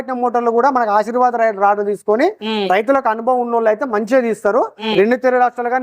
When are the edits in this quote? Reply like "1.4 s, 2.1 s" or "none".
4.8 s